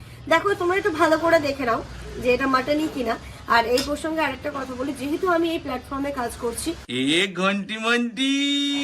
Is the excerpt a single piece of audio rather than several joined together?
no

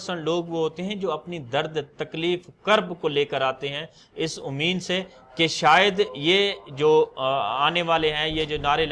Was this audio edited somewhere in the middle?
no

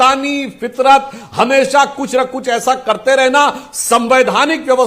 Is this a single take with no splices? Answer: yes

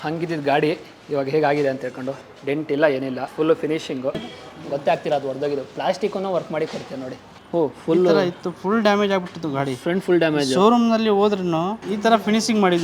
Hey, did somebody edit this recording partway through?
yes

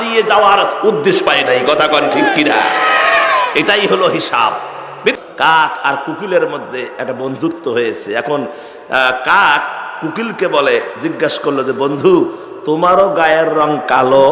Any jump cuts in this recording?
yes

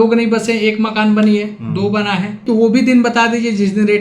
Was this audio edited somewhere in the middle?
yes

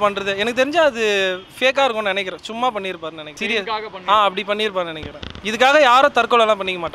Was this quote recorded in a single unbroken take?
yes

